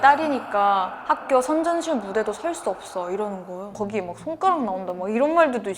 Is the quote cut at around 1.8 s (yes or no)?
no